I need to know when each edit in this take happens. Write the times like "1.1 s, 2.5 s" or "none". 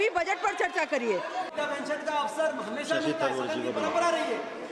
1.5 s